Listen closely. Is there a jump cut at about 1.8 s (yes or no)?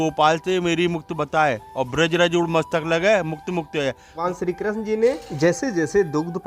no